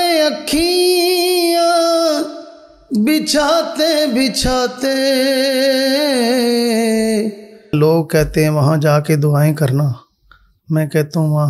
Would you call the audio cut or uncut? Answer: cut